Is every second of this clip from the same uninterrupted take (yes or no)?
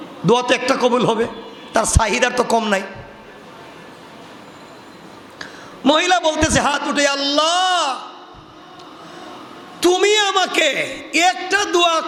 yes